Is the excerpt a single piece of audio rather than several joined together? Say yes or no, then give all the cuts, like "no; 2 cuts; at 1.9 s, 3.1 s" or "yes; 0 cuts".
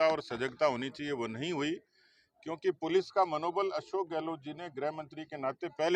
yes; 0 cuts